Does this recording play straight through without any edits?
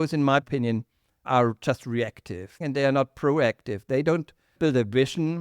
no; 1 cut; at 2.6 s

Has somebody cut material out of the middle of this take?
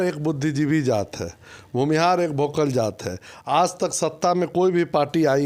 no; 0 cuts

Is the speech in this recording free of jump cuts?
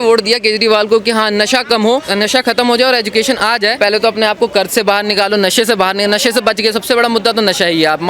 no; 2 cuts; at 2.1 s, 3.7 s

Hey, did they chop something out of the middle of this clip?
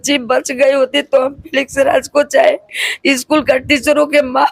no; 0 cuts

